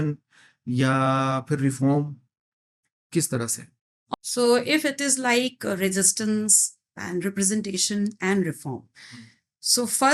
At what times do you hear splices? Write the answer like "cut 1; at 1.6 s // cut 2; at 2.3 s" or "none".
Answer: cut 1; at 4.1 s